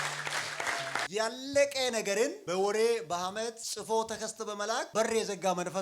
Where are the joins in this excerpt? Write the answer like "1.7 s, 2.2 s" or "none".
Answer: 1.1 s, 2.4 s, 3.7 s, 4.9 s

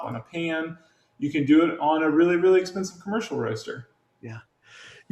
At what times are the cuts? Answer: none

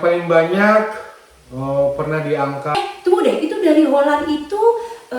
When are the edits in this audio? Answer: 2.8 s

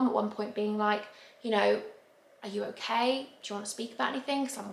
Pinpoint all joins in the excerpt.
none

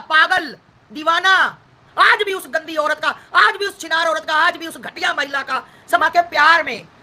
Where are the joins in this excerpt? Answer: 1.8 s, 6.0 s

